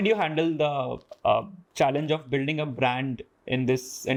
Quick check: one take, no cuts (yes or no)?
yes